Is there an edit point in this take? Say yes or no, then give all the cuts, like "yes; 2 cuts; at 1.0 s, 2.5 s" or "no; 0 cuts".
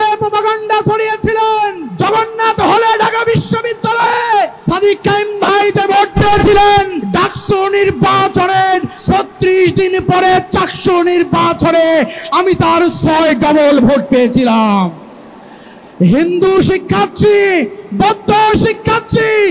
yes; 4 cuts; at 1.8 s, 4.6 s, 7.0 s, 8.9 s